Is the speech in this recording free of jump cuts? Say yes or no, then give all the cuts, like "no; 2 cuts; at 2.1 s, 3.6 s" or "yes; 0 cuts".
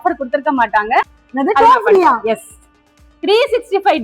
no; 1 cut; at 1.2 s